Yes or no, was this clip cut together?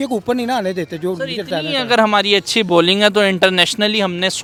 no